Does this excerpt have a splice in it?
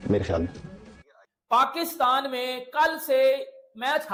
no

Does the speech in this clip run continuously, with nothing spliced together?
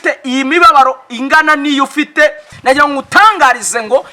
no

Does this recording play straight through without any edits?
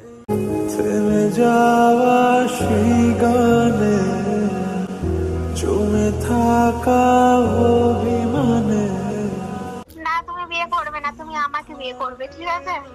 yes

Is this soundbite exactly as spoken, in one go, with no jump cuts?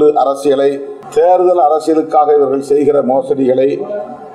no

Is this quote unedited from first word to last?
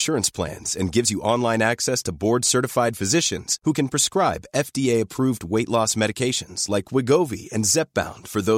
yes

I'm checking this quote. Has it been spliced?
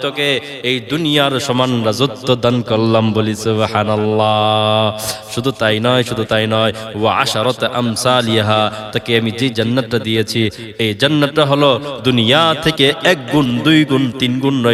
no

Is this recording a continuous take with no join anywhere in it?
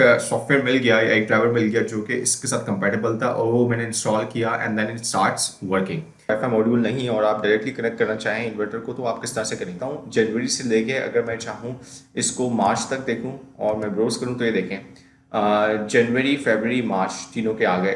no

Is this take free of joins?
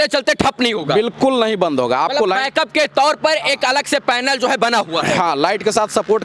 yes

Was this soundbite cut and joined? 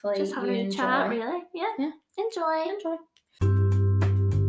yes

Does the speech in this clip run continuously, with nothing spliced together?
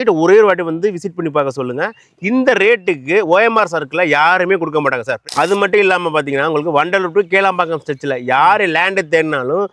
no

